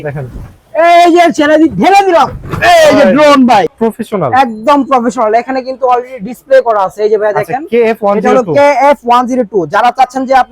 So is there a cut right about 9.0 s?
no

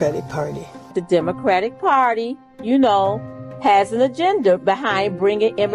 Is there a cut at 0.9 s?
yes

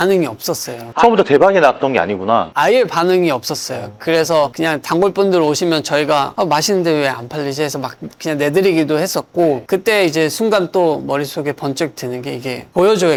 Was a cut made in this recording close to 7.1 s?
no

